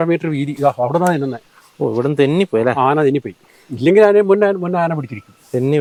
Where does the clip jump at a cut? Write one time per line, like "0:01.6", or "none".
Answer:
none